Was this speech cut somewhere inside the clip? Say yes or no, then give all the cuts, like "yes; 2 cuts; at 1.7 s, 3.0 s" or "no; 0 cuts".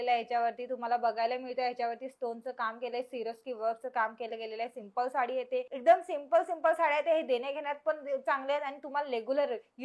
yes; 1 cut; at 5.7 s